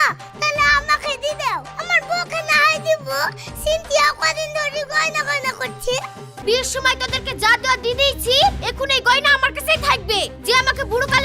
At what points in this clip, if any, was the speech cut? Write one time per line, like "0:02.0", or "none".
0:06.2

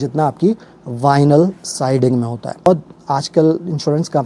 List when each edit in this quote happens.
0:02.7

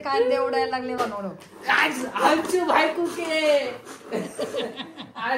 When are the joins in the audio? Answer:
0:01.0

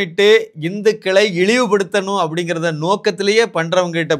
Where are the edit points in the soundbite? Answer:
none

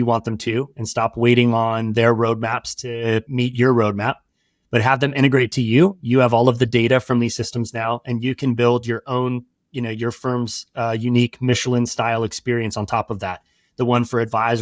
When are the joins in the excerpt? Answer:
0:03.3

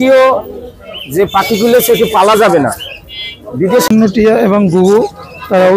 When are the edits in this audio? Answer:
0:03.9

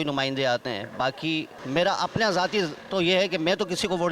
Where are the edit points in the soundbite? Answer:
0:01.6

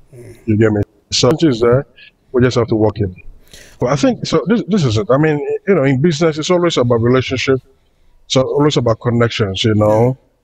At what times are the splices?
0:03.8

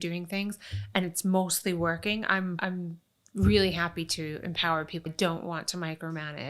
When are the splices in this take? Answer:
0:02.6
0:05.1

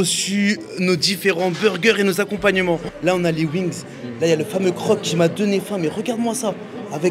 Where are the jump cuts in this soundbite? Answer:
0:02.9

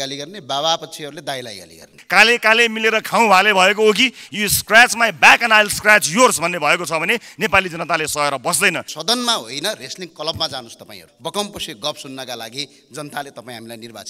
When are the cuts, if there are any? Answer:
0:02.0
0:08.9
0:11.1

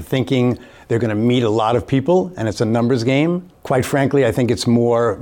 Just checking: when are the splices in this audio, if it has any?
0:03.5

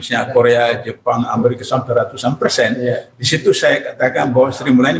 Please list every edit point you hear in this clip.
none

